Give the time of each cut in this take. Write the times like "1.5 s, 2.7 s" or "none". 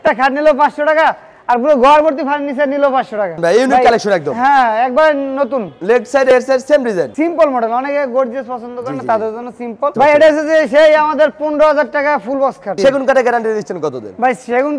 3.3 s, 7.1 s, 9.9 s, 12.7 s

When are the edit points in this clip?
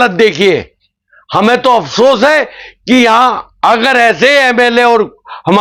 none

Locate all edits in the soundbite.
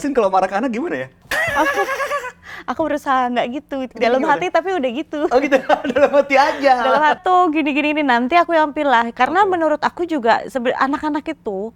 1.2 s, 7.2 s

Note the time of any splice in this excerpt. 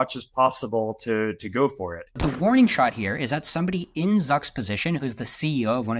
2.1 s

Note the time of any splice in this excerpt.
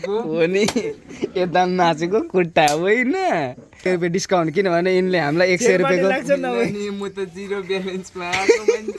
3.9 s

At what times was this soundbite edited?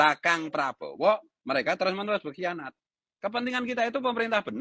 3.0 s

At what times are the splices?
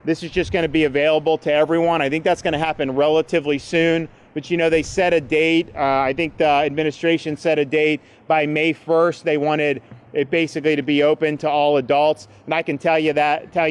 none

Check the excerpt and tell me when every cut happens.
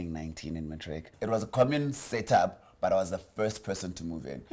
1.1 s

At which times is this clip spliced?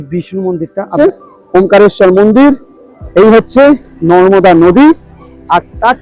0.9 s

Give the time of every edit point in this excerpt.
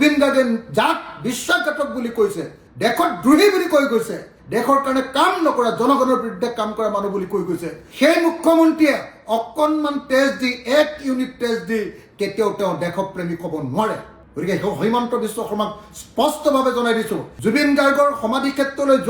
17.3 s

